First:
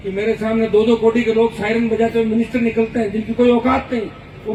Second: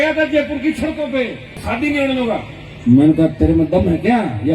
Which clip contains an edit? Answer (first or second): second